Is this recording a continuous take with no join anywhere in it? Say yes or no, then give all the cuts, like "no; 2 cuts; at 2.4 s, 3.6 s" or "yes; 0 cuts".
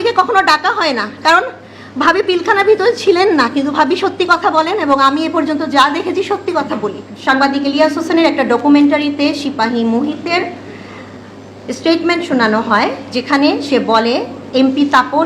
no; 1 cut; at 7.1 s